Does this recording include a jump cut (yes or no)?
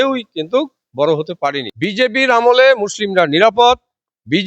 yes